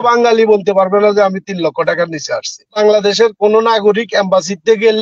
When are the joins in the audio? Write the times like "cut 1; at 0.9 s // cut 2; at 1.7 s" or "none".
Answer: cut 1; at 2.8 s